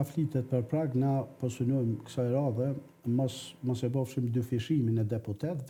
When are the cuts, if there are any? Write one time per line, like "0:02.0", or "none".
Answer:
none